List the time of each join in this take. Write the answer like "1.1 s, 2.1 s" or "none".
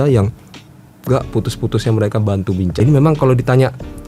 2.8 s